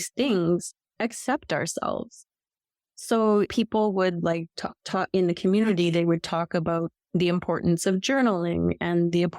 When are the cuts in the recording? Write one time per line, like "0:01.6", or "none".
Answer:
0:03.5